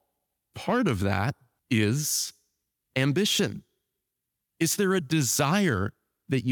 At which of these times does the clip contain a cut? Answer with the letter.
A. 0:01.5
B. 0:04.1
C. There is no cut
A